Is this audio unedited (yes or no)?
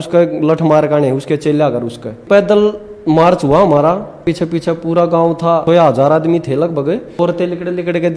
no